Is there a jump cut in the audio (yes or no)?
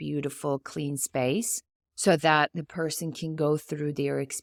no